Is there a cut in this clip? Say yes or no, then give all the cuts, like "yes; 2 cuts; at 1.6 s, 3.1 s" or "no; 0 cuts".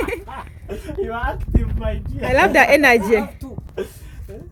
no; 0 cuts